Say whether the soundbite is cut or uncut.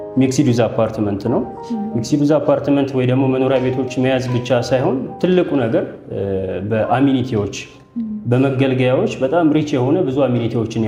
uncut